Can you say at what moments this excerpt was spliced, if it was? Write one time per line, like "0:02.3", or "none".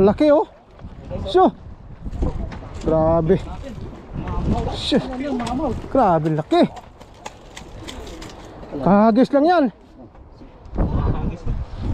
none